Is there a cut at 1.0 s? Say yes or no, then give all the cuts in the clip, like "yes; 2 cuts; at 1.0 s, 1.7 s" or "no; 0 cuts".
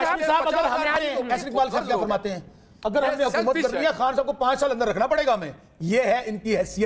yes; 1 cut; at 1.0 s